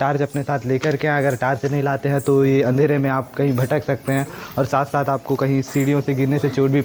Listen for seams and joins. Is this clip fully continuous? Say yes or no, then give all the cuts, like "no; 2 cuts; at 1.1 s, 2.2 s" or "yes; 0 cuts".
yes; 0 cuts